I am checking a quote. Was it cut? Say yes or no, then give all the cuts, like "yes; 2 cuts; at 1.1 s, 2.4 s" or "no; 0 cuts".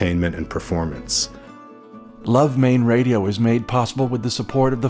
yes; 1 cut; at 1.9 s